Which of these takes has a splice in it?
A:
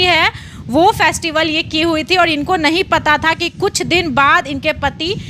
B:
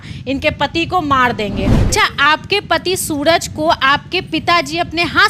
B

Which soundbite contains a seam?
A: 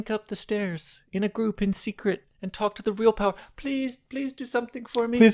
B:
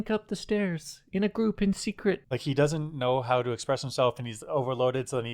B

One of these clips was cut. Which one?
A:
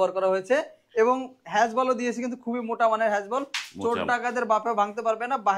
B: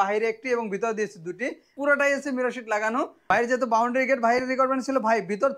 B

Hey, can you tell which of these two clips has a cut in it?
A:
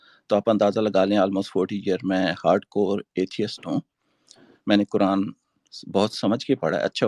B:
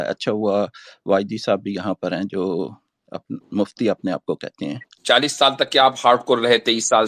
B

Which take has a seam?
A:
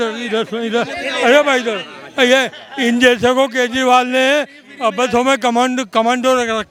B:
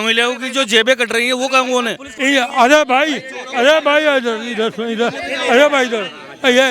B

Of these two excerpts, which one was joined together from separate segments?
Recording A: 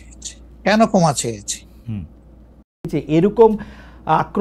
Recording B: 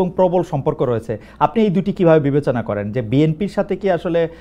A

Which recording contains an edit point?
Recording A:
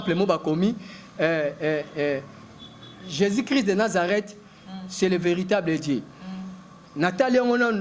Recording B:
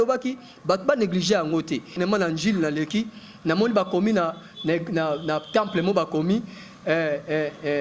B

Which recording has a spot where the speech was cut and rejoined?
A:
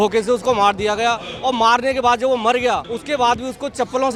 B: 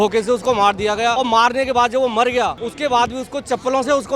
B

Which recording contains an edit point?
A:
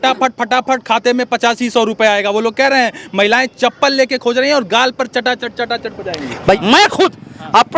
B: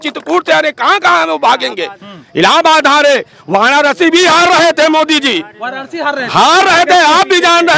A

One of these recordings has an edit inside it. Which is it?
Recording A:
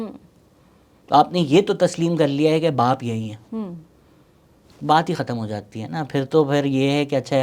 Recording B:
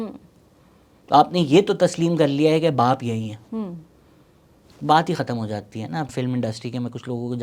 B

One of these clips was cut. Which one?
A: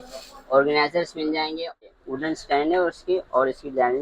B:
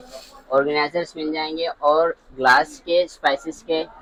A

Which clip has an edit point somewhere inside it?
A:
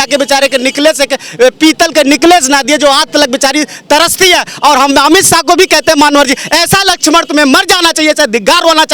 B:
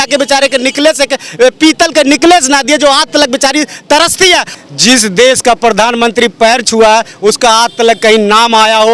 B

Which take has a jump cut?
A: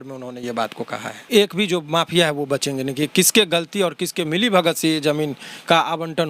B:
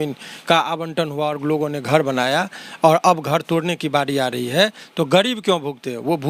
A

